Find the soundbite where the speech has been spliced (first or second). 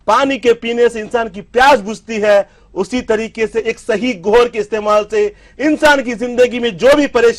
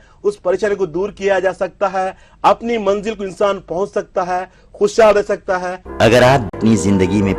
second